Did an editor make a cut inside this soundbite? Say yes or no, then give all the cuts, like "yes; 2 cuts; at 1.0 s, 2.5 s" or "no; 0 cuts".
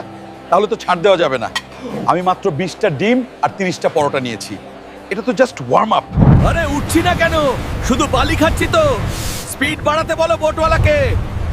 yes; 1 cut; at 6.4 s